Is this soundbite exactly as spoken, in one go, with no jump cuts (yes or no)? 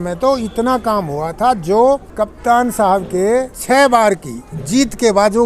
no